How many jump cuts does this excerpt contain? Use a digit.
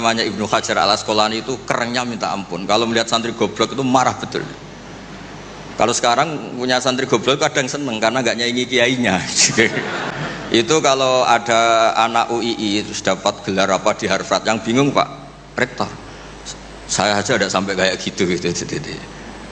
1